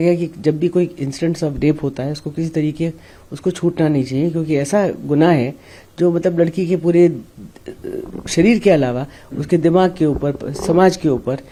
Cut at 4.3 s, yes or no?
no